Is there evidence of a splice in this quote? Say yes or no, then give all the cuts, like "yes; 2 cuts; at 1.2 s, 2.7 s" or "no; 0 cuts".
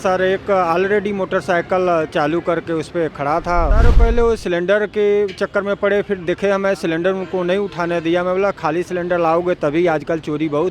yes; 1 cut; at 3.7 s